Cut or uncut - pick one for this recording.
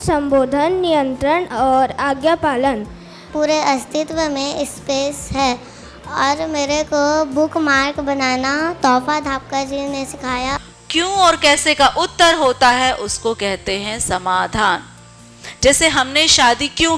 cut